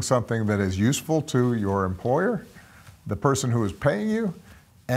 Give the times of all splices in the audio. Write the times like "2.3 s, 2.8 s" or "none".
none

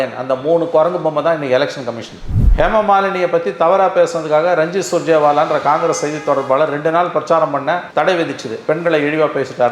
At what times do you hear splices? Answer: 2.4 s

